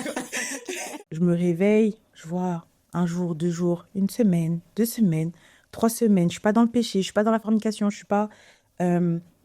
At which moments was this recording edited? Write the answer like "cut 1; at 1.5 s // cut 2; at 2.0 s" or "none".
cut 1; at 1.1 s